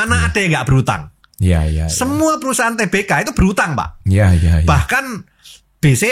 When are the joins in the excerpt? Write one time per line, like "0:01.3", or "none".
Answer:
none